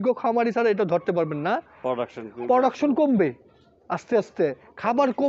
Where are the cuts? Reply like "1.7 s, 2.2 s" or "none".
none